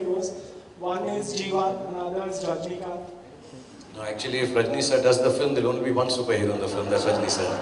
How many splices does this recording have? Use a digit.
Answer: 0